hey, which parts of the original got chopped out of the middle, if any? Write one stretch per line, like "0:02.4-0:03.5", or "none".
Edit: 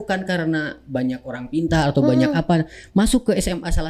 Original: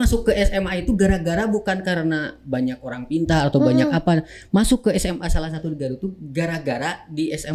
none

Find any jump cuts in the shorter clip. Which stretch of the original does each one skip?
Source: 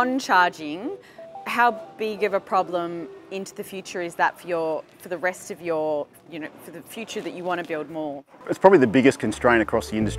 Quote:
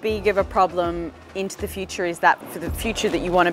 0:04.4-0:06.6

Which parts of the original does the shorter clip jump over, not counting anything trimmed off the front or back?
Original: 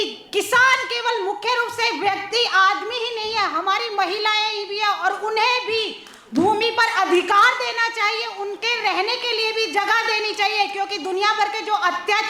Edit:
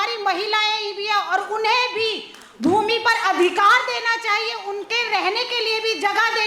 none

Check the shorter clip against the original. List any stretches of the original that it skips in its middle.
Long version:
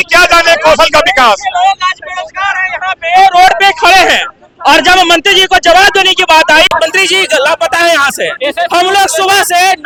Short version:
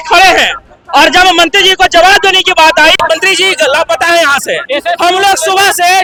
none

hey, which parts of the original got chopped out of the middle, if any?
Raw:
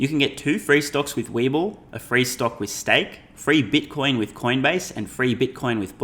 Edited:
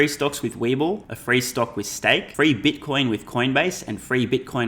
0:01.9-0:02.0
0:03.1-0:03.4

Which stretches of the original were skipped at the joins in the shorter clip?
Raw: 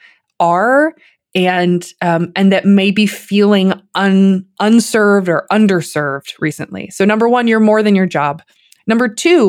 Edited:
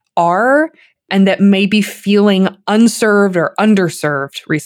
0:01.3-0:02.3
0:03.8-0:04.5

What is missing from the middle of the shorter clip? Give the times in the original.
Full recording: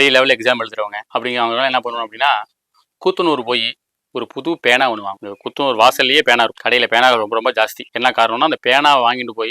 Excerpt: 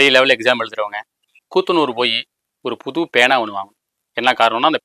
0:01.0-0:02.5
0:05.5-0:07.8

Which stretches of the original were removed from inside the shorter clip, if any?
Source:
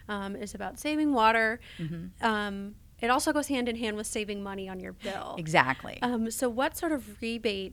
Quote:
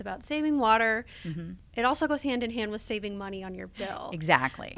0:02.0-0:02.8

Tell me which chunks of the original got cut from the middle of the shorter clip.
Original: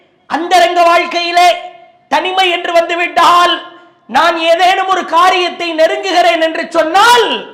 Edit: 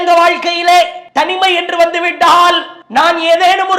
0:01.7-0:02.0
0:03.7-0:03.9

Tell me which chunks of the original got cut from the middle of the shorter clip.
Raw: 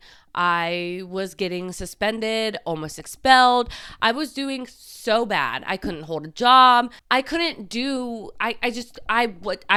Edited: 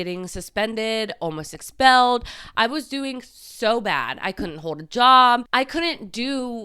0:06.9-0:07.0

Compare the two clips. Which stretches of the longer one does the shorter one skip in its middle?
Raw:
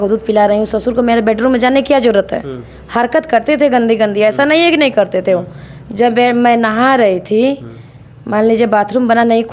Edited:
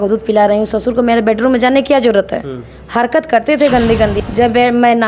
0:04.1-0:05.8

